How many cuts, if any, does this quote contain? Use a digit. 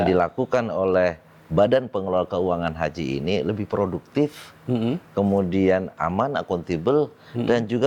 0